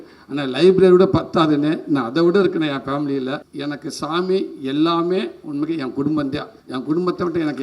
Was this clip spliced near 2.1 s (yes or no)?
no